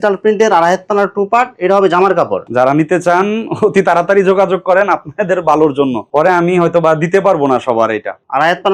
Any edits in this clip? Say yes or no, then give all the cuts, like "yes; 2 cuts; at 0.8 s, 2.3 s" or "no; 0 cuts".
no; 0 cuts